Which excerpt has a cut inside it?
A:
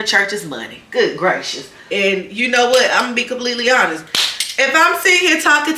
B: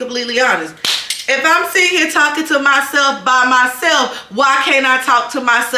A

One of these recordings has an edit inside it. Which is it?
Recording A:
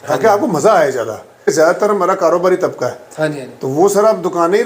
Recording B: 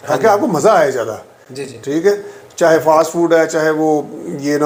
A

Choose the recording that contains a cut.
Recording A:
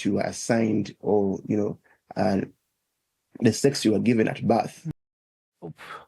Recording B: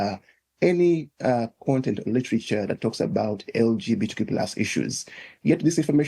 A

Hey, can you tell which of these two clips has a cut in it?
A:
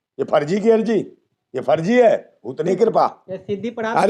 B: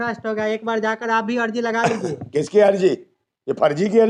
A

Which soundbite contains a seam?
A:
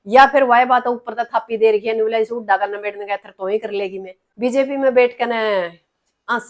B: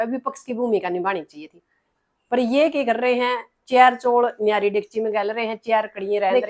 A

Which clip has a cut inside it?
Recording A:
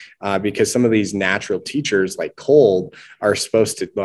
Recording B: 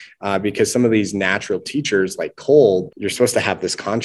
B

